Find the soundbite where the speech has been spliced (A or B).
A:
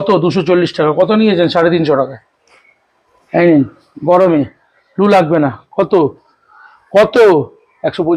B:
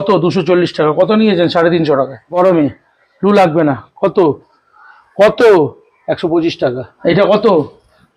B